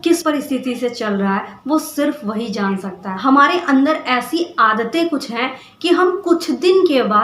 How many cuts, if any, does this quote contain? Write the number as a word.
one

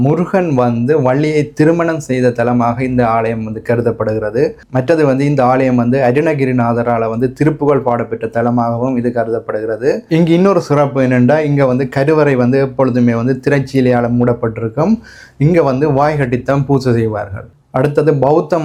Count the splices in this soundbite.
zero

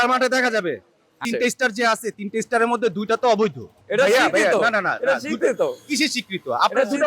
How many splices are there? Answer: two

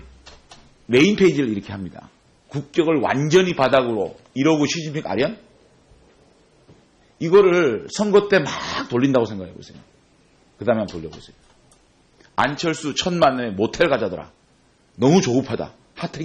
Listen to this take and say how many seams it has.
zero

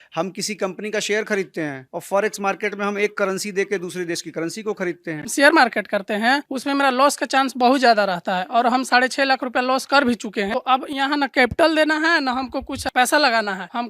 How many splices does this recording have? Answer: two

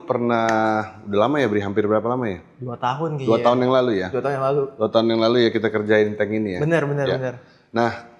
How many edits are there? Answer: zero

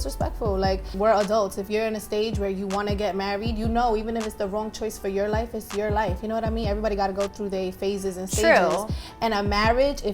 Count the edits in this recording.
one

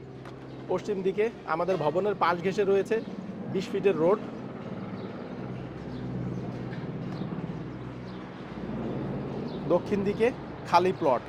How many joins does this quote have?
zero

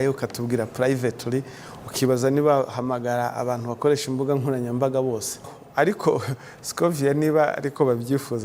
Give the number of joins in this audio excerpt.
one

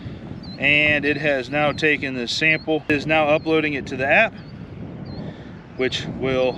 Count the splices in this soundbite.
one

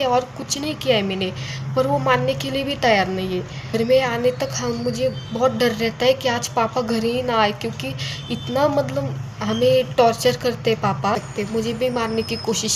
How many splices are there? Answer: two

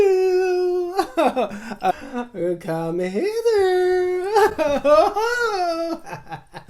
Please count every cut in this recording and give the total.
one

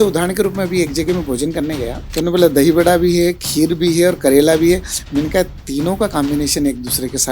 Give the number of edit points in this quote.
one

